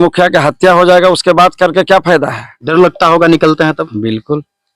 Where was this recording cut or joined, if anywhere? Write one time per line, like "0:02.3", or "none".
0:02.5

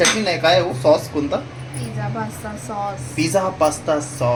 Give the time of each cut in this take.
none

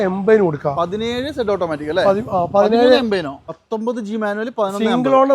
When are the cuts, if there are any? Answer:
0:03.4

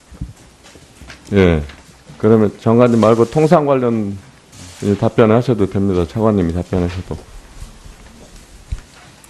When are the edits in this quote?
0:05.4

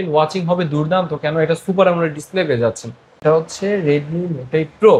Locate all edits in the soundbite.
0:03.2

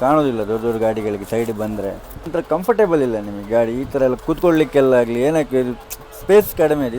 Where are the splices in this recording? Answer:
0:02.3

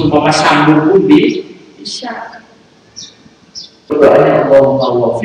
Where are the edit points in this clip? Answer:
0:03.9

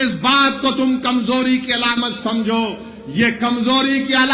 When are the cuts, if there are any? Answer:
none

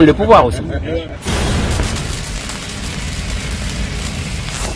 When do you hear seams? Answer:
0:01.4

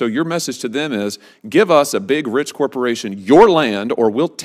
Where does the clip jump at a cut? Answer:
none

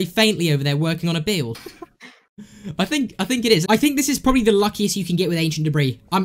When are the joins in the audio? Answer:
0:03.6

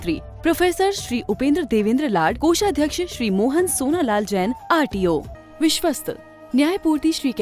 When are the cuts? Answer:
0:05.4

